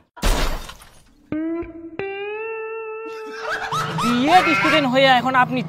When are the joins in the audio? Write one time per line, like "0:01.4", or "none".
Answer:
0:03.4